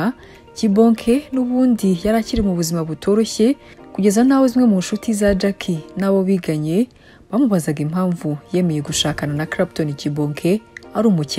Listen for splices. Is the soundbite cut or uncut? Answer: uncut